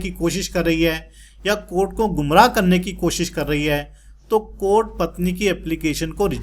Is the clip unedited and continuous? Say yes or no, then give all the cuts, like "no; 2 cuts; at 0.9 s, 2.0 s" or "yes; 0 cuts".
yes; 0 cuts